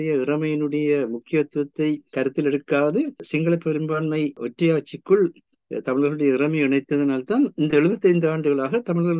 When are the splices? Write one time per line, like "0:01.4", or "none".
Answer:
0:02.1
0:03.2
0:04.4